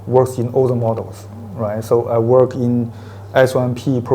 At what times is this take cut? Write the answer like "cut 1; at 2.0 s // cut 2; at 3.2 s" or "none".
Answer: none